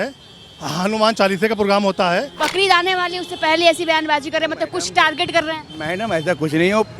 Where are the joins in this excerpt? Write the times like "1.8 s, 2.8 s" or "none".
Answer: 2.4 s